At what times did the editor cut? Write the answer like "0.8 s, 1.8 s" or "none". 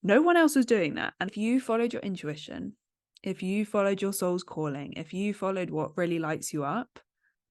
1.3 s